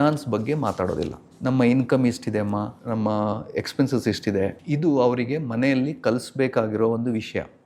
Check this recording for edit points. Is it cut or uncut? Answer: cut